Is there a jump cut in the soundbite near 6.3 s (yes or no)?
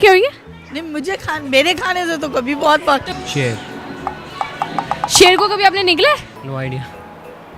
yes